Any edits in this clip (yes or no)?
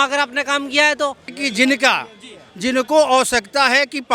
yes